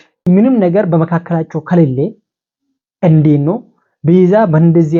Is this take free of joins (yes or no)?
yes